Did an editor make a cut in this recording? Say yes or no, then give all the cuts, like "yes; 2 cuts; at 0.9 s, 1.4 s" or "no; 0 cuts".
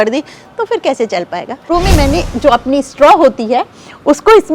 yes; 1 cut; at 1.7 s